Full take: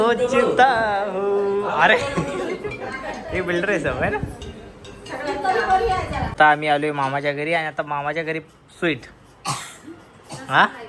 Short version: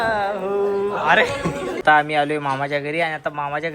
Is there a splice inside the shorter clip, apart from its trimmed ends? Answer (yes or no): yes